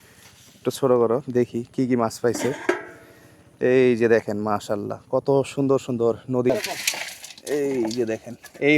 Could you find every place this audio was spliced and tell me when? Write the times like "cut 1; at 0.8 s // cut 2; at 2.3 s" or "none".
cut 1; at 6.5 s